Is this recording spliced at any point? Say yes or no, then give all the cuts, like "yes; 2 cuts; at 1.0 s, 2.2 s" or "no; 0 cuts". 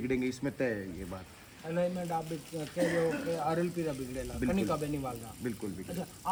no; 0 cuts